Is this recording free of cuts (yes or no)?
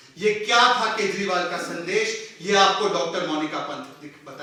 yes